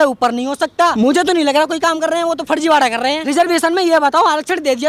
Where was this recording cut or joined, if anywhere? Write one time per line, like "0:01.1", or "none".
0:00.9
0:03.2

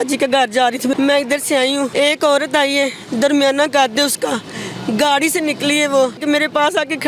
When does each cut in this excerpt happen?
0:00.9
0:01.9
0:06.2

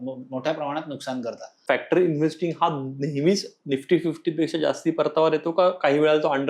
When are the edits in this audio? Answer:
0:01.6

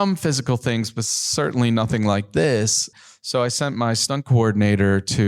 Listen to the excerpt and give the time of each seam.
0:02.9
0:04.0

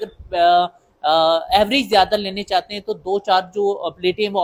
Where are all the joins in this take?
none

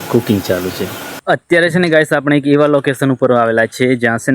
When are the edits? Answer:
0:01.2

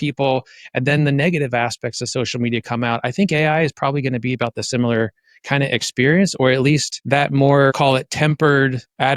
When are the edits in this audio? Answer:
0:06.9
0:07.8

